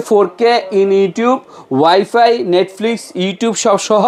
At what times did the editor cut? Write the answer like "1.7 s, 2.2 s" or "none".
none